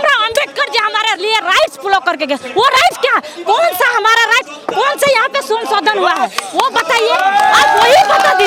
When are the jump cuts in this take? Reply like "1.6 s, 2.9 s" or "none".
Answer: none